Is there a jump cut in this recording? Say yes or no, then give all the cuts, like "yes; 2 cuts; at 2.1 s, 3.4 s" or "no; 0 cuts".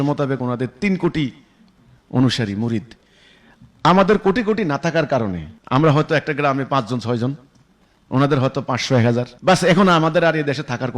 yes; 2 cuts; at 5.5 s, 9.3 s